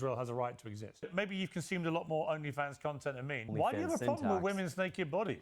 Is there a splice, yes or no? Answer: yes